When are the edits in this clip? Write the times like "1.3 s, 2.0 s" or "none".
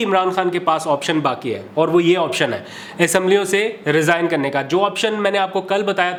none